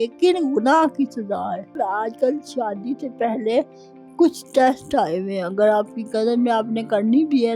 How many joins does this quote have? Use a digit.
1